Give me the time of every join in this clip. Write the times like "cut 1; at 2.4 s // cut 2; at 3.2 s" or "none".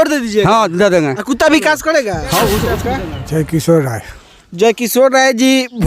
cut 1; at 2.8 s